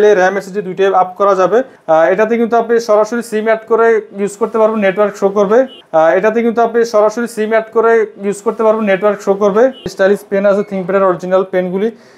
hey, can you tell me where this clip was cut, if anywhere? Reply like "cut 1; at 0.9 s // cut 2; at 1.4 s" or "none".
cut 1; at 1.7 s // cut 2; at 5.8 s // cut 3; at 9.9 s

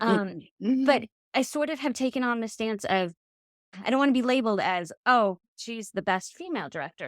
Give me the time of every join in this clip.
cut 1; at 3.6 s

